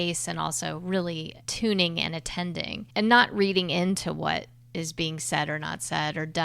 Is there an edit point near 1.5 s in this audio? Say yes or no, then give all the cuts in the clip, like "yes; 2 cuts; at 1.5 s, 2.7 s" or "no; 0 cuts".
yes; 2 cuts; at 1.5 s, 2.7 s